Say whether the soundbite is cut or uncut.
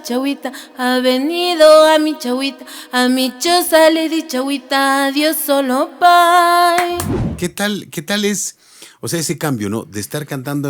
cut